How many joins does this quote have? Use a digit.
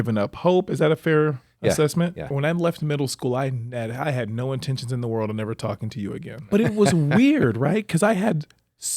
2